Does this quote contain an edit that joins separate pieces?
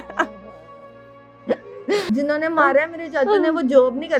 yes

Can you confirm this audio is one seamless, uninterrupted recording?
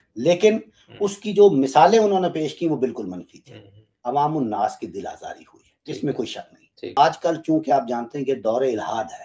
no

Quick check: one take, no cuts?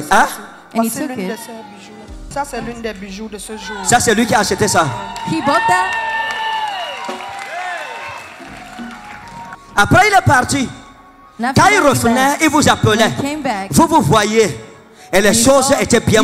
no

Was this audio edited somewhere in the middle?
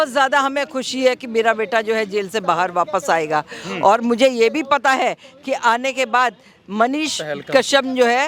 no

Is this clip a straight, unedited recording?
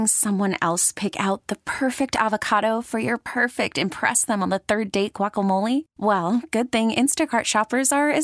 yes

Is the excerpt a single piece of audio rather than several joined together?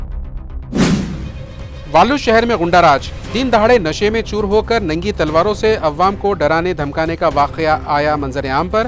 yes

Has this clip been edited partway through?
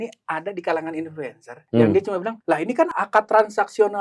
yes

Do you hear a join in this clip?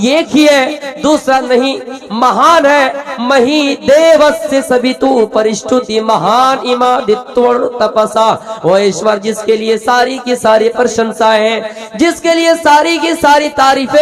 no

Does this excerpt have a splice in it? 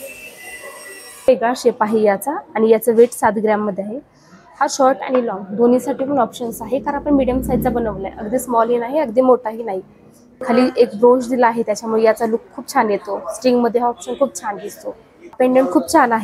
yes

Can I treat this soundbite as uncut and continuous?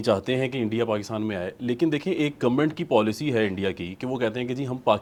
yes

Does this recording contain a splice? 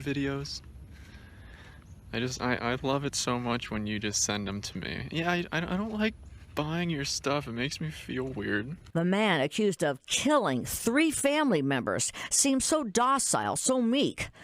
yes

